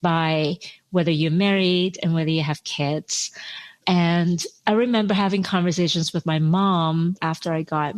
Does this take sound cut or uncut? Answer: cut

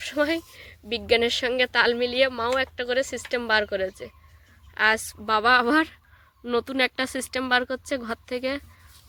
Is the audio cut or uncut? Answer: uncut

